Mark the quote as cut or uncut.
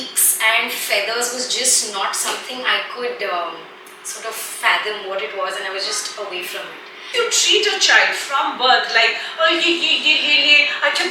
cut